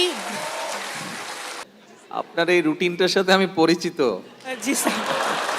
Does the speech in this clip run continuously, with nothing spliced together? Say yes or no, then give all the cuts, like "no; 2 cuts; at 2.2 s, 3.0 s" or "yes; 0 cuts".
no; 1 cut; at 1.6 s